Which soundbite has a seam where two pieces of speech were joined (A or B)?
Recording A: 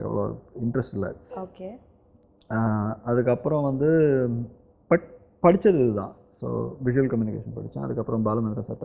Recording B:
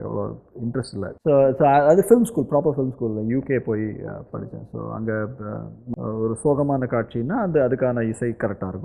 B